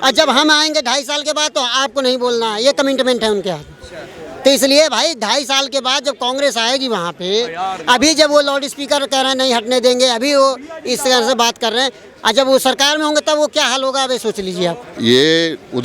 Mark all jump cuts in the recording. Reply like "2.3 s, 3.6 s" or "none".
14.9 s